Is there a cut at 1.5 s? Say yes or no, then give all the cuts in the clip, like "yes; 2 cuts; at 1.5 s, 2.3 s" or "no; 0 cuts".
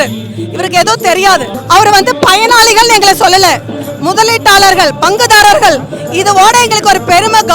yes; 1 cut; at 1.5 s